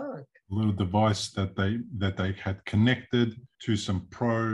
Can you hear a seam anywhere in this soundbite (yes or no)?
yes